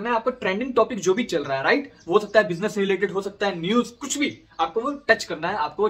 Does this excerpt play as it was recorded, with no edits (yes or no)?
yes